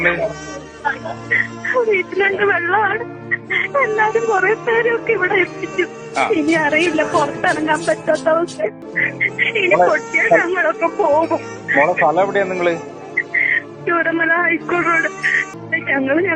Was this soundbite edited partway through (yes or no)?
yes